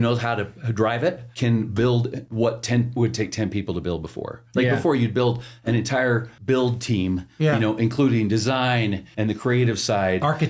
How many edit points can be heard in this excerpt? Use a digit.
4